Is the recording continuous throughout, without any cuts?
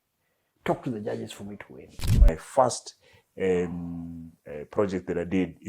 no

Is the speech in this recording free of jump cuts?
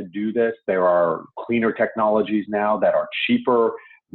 yes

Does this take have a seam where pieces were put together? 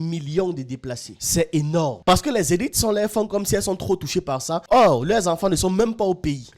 yes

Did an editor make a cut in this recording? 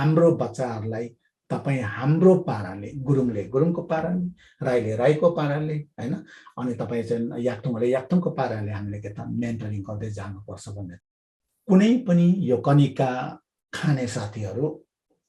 yes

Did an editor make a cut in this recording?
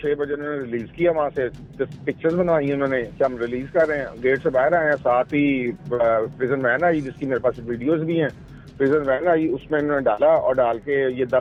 no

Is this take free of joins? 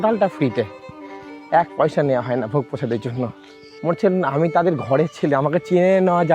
no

